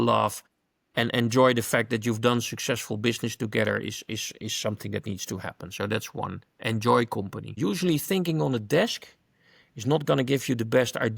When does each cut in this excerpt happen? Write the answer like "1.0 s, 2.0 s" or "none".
7.5 s